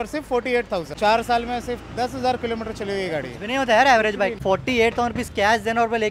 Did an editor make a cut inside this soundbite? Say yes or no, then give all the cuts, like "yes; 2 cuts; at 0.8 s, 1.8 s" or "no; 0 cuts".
yes; 2 cuts; at 0.9 s, 4.4 s